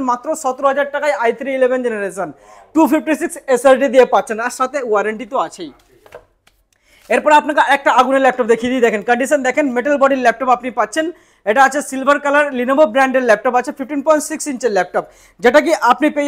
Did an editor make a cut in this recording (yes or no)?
no